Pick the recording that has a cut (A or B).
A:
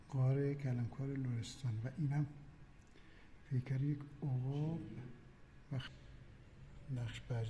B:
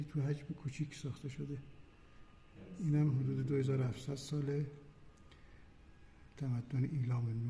A